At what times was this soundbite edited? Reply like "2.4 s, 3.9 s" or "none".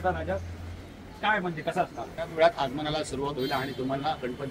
2.3 s